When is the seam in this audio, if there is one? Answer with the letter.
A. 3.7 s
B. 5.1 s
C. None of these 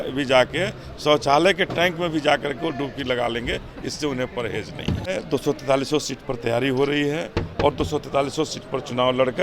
B